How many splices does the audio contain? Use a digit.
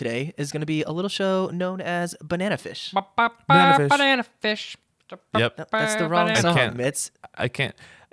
0